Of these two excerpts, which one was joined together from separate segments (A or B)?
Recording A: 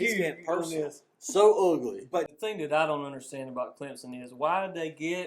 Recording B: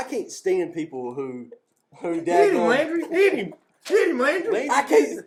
A